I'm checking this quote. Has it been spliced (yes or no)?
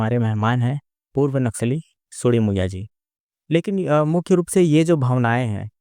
yes